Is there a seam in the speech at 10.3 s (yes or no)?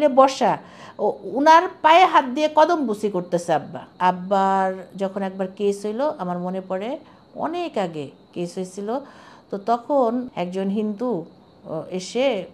yes